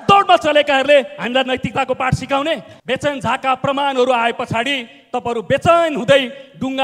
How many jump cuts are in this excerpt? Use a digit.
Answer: 1